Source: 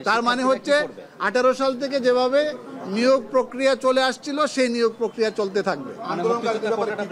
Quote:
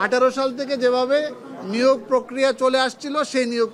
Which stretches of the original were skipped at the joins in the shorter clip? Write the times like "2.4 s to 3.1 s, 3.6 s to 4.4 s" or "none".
none

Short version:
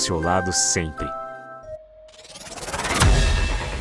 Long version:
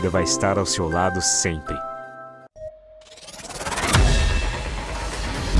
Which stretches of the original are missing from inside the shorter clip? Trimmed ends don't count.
2.2 s to 2.5 s

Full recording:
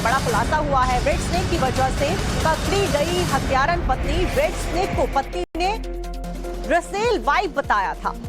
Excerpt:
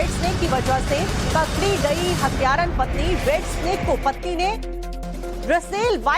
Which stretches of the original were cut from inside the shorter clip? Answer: 5.4 s to 5.6 s

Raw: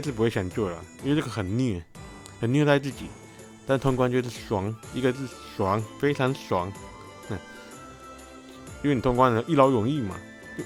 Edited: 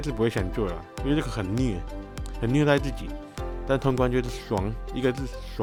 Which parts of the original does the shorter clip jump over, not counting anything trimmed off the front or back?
none

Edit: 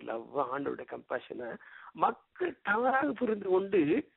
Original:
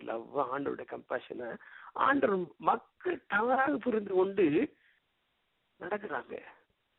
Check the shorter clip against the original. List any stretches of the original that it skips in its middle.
1.9 s to 2.5 s

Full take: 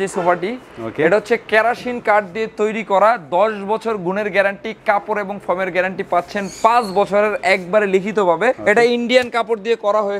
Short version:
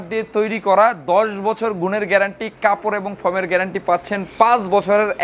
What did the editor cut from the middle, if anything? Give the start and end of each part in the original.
none

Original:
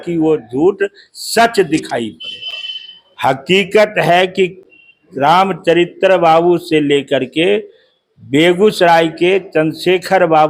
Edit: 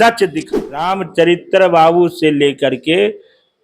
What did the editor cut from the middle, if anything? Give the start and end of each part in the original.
2.3 s to 5.4 s

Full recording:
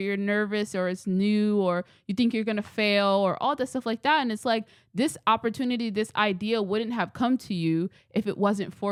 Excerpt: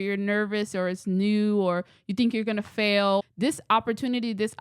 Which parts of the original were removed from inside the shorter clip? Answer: 3.2 s to 4.8 s

